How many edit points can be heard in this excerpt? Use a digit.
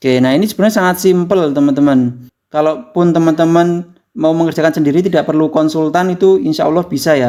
0